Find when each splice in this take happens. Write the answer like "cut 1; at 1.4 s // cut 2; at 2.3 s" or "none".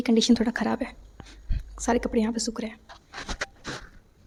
none